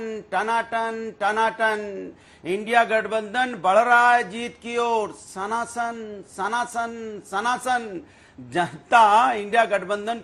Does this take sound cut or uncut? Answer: uncut